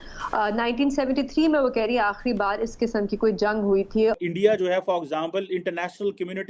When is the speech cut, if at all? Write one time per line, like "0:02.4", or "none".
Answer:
0:04.2